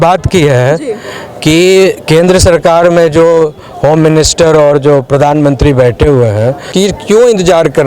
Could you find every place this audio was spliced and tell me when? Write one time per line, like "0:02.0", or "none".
0:06.7